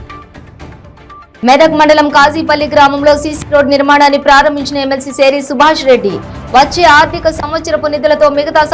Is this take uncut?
yes; 0 cuts

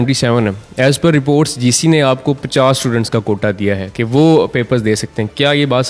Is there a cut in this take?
no; 0 cuts

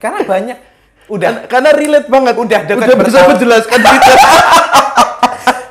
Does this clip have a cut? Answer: no; 0 cuts

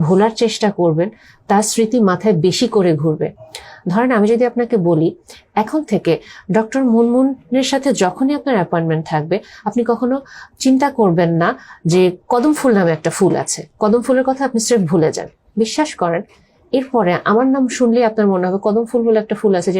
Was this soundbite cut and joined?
no; 0 cuts

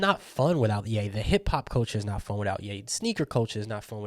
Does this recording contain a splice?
yes; 1 cut; at 1.0 s

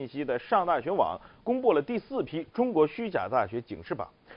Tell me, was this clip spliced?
yes; 1 cut; at 1.8 s

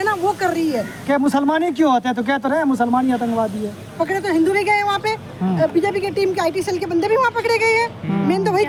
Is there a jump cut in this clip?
no; 0 cuts

